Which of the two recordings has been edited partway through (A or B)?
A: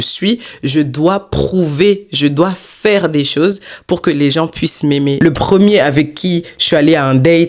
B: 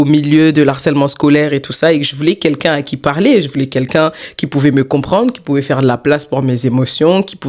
A